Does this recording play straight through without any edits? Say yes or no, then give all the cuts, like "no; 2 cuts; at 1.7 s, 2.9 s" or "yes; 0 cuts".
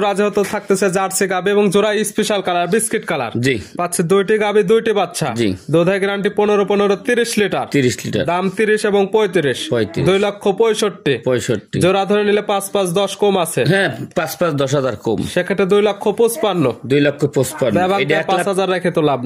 yes; 0 cuts